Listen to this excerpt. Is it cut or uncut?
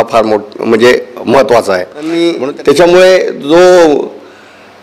cut